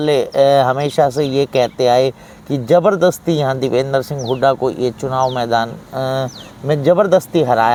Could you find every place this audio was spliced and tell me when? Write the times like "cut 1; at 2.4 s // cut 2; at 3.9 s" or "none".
none